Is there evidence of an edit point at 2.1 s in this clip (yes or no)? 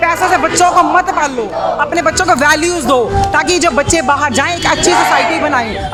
no